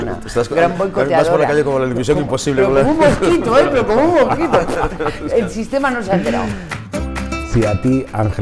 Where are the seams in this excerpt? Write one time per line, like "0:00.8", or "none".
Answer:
0:06.8